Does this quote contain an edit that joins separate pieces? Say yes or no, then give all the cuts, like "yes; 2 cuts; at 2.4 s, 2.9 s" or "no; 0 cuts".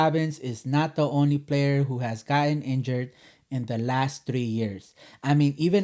no; 0 cuts